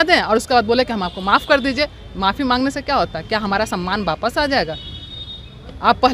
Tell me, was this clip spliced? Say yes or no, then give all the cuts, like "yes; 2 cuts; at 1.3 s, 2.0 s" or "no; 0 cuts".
no; 0 cuts